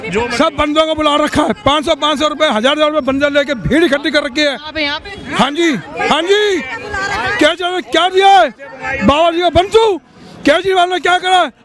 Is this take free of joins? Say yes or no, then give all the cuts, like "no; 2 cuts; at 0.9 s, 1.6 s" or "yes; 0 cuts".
yes; 0 cuts